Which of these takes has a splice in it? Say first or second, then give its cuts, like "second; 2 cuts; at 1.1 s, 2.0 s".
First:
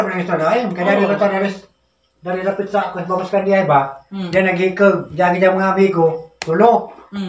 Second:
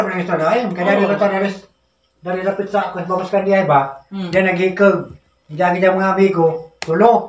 first; 1 cut; at 5.1 s